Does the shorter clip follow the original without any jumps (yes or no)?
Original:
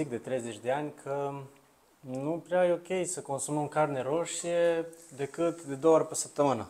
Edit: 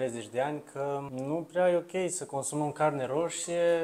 no